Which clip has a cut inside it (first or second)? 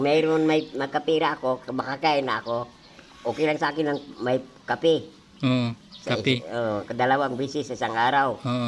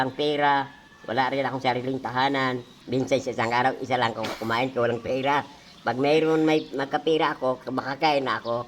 second